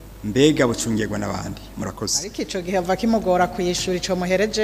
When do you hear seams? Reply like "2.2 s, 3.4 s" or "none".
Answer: 2.2 s